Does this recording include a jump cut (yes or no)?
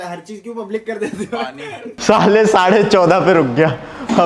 yes